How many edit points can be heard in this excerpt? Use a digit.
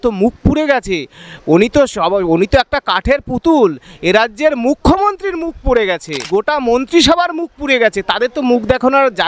1